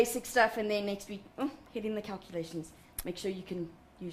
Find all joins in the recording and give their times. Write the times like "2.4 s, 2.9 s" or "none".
3.2 s